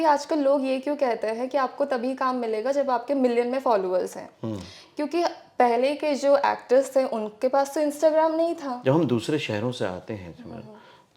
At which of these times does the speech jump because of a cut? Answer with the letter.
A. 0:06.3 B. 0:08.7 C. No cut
B